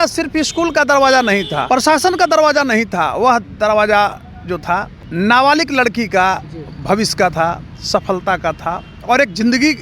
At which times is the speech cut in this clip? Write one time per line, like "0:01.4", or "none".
0:01.6
0:05.0

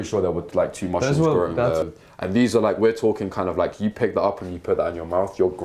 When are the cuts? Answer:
0:01.8

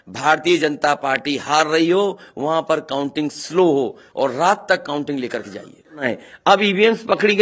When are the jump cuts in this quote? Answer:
0:06.0

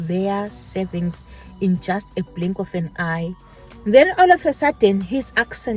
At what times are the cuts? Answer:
0:03.4

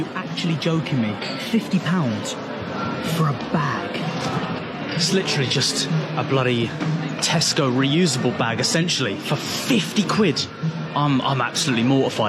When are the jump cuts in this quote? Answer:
none

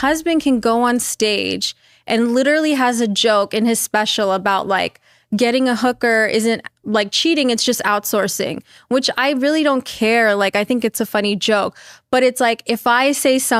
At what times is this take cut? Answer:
none

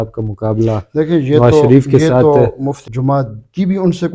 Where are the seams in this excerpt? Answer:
0:02.8

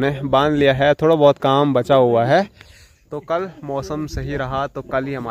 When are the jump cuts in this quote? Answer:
none

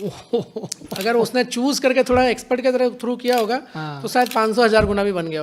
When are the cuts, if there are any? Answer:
none

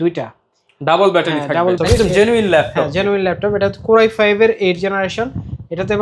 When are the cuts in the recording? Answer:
0:01.8

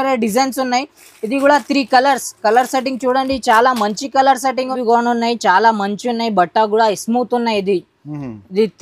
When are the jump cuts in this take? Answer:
0:04.7

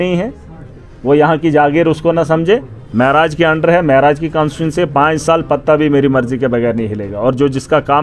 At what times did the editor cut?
none

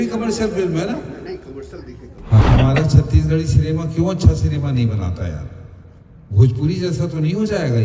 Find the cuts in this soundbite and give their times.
0:02.4

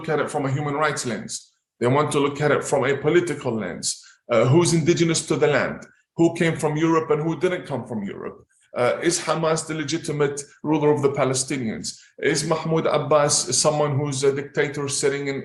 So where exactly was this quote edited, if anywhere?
none

